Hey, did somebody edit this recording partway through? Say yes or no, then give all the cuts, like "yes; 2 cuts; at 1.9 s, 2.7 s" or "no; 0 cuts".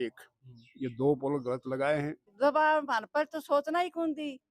yes; 1 cut; at 2.2 s